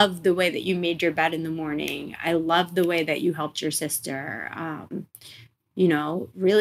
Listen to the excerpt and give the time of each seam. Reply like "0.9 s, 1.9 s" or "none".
none